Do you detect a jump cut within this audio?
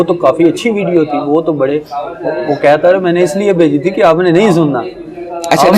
no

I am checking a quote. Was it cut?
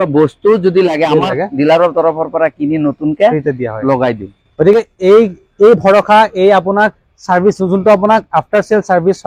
no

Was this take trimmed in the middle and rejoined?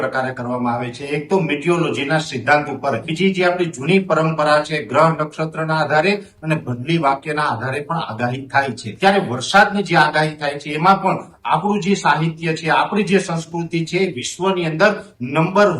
yes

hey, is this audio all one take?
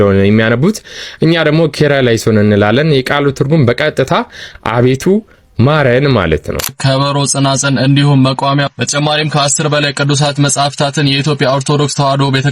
no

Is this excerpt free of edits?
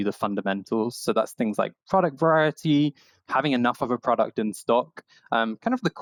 yes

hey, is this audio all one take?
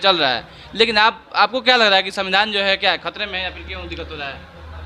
yes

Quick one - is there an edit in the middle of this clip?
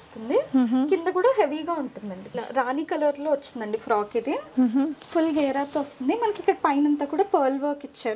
yes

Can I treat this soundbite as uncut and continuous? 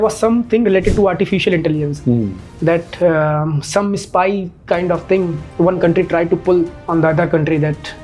no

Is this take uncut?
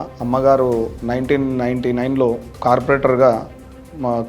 no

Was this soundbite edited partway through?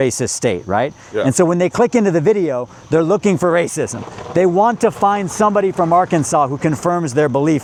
no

